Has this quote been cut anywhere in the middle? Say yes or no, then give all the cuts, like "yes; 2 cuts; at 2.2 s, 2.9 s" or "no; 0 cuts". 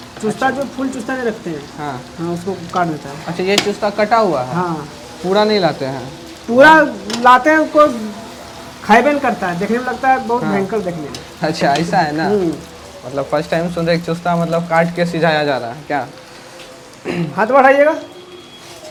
no; 0 cuts